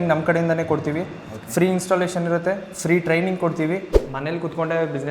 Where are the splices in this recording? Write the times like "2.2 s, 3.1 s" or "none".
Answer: 4.0 s